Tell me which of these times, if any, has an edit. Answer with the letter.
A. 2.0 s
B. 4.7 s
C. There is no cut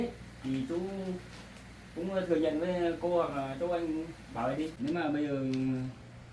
B